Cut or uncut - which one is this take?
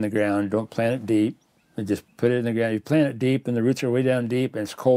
uncut